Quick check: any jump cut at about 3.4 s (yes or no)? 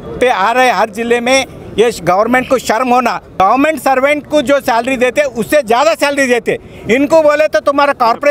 yes